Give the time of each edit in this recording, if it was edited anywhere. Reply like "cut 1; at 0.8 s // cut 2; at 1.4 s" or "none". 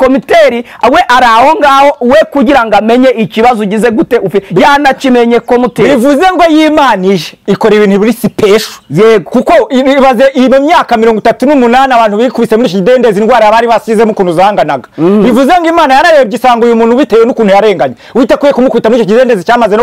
none